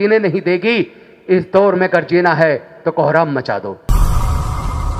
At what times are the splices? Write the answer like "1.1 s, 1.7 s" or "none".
3.8 s